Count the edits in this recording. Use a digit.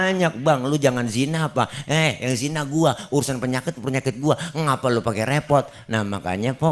0